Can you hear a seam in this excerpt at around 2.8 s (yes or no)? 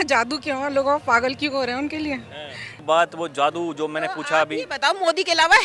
yes